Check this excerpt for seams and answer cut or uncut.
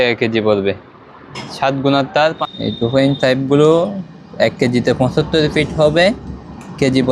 cut